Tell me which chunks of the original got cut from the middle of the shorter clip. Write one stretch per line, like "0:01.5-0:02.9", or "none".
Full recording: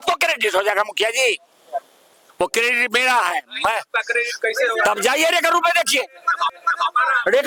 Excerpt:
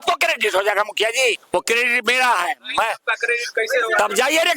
0:01.4-0:02.3